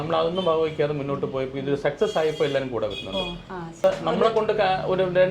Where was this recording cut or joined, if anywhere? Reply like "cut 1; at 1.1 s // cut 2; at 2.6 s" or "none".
cut 1; at 3.8 s

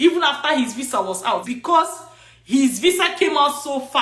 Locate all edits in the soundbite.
cut 1; at 1.5 s

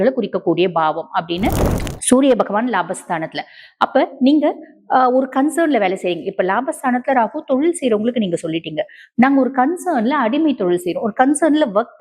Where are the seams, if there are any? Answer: cut 1; at 1.7 s

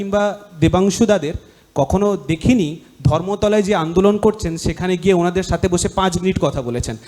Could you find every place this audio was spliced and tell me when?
none

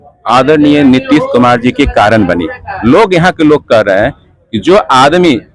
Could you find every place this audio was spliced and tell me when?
cut 1; at 2.7 s

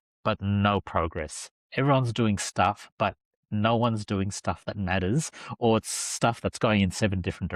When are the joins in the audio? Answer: none

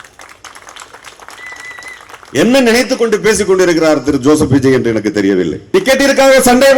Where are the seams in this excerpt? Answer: cut 1; at 5.6 s

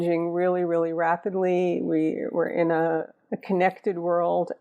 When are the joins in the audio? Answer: cut 1; at 3.2 s

